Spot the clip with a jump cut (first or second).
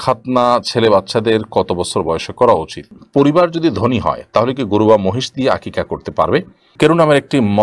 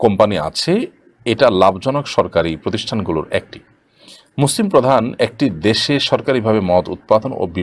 first